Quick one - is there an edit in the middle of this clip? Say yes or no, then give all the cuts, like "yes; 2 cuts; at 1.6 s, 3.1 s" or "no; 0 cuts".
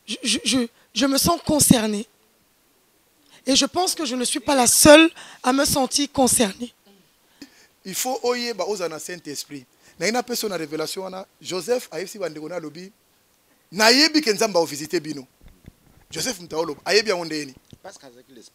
yes; 1 cut; at 7.5 s